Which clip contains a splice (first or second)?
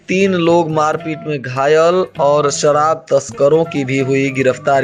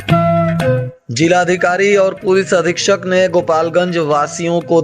second